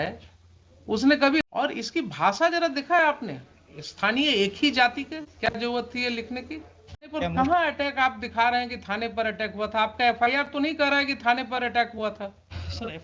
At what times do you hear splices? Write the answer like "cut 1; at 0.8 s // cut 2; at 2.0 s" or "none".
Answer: cut 1; at 1.4 s // cut 2; at 7.1 s